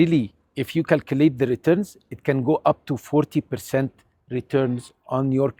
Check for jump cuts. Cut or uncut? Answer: uncut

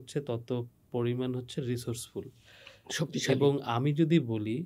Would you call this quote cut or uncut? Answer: uncut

